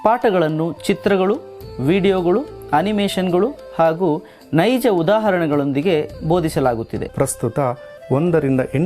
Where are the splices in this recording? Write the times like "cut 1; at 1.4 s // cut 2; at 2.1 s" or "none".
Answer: cut 1; at 7.0 s

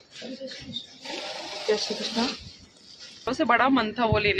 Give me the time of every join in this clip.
cut 1; at 3.3 s

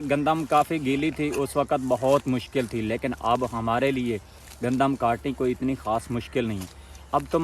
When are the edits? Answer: none

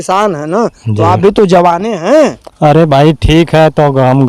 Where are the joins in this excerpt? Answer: none

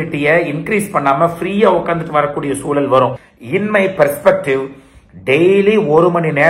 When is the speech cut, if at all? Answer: cut 1; at 3.3 s

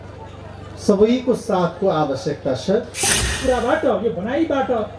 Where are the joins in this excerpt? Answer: cut 1; at 3.1 s

